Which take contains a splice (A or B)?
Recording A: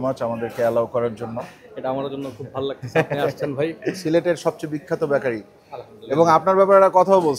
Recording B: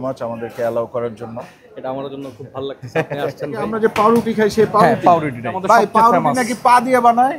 B